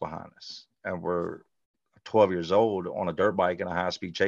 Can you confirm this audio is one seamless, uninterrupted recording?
yes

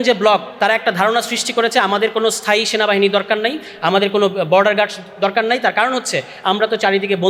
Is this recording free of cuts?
yes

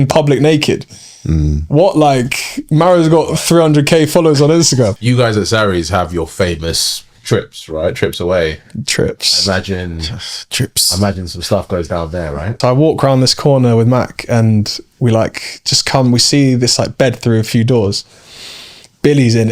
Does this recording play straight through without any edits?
no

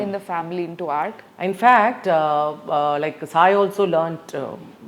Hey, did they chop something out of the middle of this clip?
no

